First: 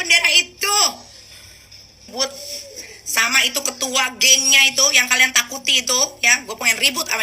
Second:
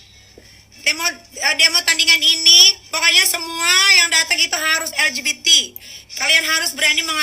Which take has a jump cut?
first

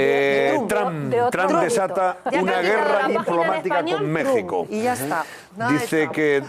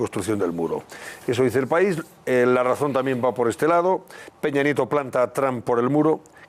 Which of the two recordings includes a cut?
second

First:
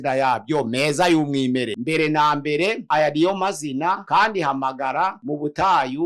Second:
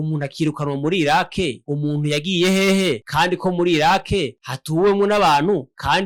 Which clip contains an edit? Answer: first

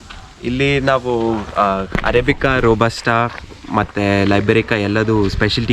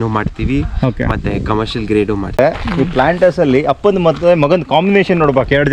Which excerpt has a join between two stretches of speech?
second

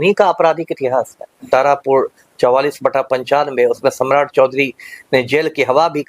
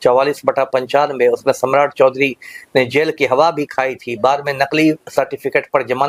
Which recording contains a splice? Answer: first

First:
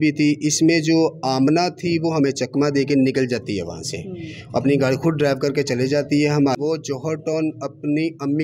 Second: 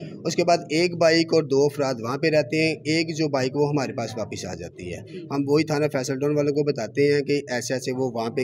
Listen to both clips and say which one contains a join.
first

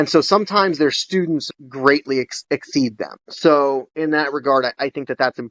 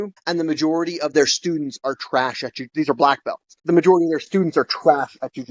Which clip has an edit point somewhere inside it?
first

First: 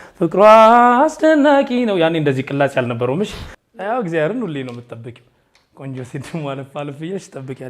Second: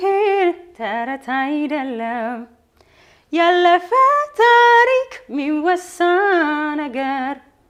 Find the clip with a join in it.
first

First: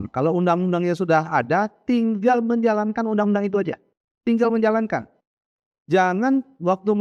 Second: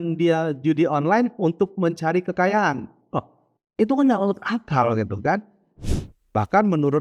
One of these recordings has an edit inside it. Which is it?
second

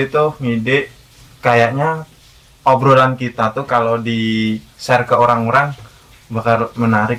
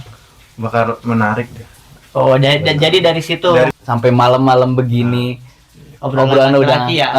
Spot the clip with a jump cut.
second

